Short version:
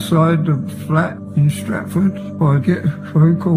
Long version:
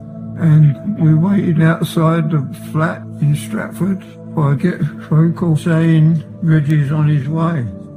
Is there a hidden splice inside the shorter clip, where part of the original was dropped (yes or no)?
yes